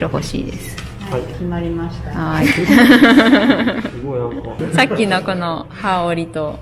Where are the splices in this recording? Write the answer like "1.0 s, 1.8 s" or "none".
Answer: 4.5 s